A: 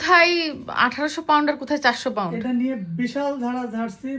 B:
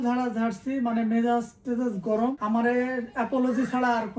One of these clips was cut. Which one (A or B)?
B